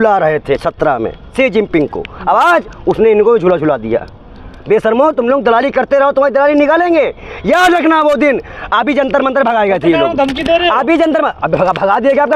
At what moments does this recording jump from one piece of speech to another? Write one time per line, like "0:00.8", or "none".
none